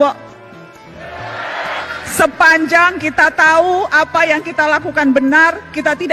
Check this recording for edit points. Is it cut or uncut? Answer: cut